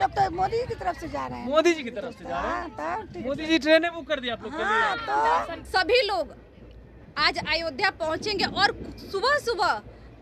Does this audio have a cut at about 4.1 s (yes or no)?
no